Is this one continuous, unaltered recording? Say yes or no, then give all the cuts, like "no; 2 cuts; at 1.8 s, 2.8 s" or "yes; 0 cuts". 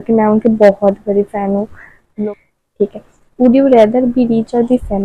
no; 1 cut; at 2.0 s